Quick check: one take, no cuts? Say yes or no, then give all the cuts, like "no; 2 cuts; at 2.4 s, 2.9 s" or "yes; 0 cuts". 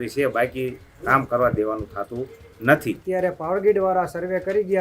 no; 1 cut; at 3.0 s